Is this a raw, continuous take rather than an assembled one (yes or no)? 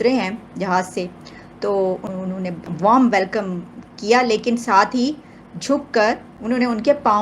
no